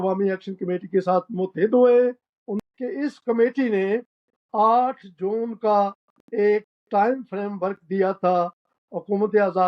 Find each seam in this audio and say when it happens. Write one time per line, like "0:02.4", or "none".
0:02.5